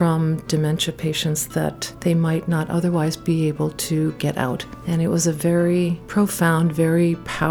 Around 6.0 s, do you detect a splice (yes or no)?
yes